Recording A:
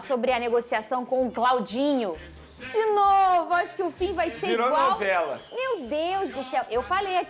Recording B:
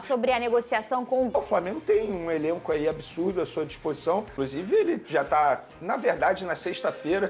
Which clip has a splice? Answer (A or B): B